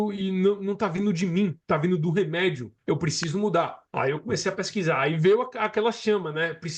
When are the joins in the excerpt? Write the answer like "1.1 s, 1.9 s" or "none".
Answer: 1.6 s, 2.7 s, 3.8 s